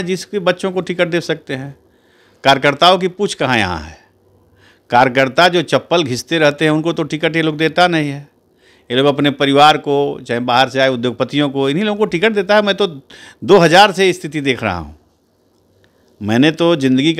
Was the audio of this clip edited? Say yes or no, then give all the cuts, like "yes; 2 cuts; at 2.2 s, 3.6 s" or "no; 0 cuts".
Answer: no; 0 cuts